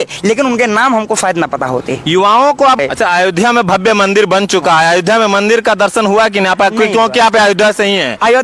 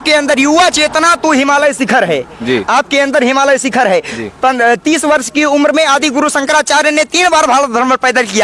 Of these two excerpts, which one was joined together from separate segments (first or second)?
first